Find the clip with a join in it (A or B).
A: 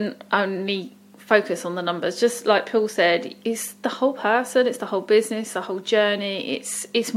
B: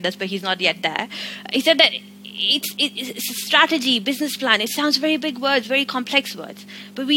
A